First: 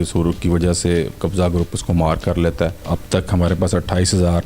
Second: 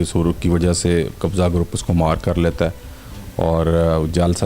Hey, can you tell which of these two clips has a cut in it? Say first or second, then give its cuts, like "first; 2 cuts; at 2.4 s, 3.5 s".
first; 1 cut; at 2.8 s